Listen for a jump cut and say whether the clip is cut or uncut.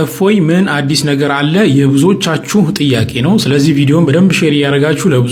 uncut